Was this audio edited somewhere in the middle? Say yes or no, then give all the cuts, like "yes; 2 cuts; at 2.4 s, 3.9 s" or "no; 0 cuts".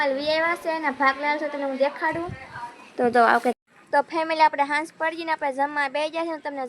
yes; 1 cut; at 3.6 s